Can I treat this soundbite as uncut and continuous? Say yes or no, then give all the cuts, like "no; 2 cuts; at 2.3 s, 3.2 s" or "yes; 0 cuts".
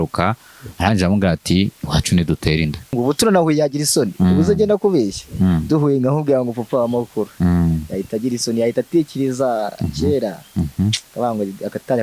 no; 1 cut; at 2.9 s